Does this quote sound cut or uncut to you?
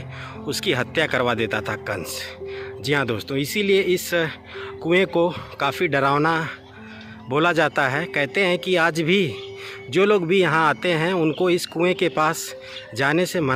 uncut